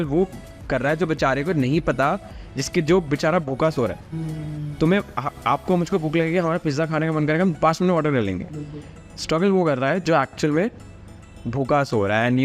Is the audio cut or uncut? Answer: uncut